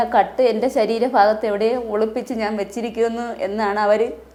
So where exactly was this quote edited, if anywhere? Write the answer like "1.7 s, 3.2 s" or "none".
none